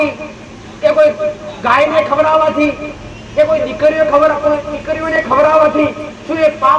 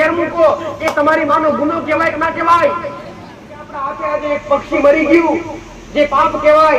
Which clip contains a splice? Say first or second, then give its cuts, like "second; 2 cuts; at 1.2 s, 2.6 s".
second; 1 cut; at 3.7 s